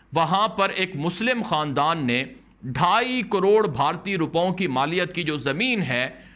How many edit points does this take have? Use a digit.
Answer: 0